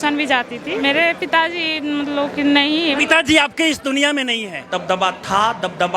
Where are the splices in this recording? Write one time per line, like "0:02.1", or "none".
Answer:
0:00.8
0:03.0
0:04.7